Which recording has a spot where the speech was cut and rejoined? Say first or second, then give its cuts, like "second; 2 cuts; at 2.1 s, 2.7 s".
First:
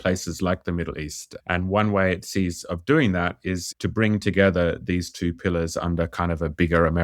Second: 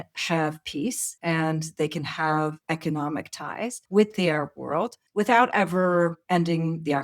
second; 5 cuts; at 1.1 s, 2.6 s, 3.8 s, 5.0 s, 6.2 s